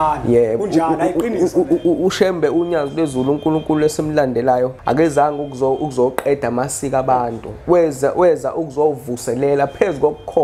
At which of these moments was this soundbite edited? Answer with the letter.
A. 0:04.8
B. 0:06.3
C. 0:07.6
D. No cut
A